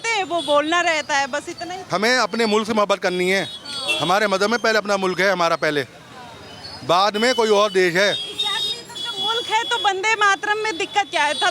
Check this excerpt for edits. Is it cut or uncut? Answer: cut